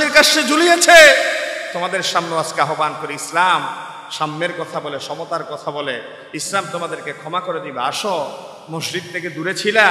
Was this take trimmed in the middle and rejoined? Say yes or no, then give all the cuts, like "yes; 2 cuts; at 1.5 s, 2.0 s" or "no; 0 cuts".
no; 0 cuts